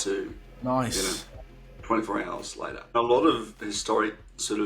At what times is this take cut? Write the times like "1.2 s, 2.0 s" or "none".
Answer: 2.9 s